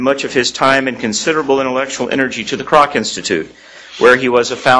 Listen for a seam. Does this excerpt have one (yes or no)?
yes